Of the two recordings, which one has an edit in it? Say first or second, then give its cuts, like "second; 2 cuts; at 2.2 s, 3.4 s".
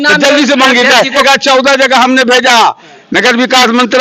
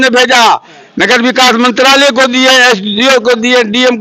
first; 1 cut; at 1.2 s